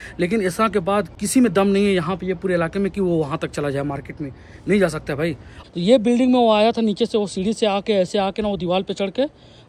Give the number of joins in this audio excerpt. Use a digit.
2